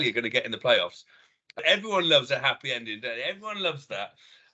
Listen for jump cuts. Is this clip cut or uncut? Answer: cut